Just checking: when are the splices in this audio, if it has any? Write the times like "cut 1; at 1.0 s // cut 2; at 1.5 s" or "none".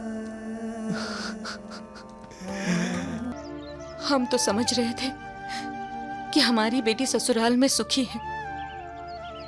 cut 1; at 3.3 s